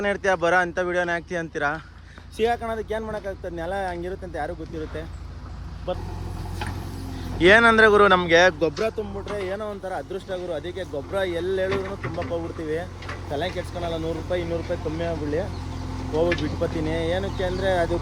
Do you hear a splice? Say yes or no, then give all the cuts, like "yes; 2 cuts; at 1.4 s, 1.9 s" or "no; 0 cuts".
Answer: yes; 1 cut; at 5.9 s